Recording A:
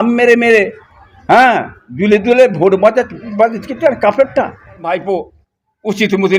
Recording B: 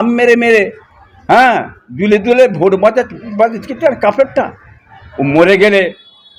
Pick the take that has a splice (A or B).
A